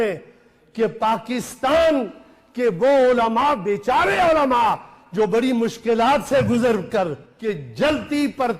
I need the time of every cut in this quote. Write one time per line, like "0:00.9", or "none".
0:07.3